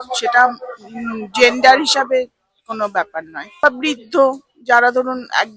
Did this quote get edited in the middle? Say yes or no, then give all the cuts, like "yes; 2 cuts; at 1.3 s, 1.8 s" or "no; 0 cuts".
no; 0 cuts